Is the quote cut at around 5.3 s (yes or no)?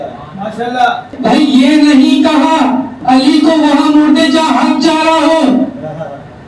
no